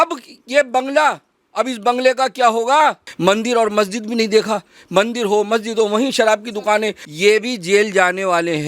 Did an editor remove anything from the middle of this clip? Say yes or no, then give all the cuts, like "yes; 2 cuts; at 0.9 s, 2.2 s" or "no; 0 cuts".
yes; 2 cuts; at 3.1 s, 7.0 s